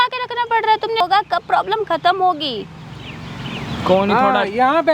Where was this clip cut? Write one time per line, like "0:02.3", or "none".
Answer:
0:01.0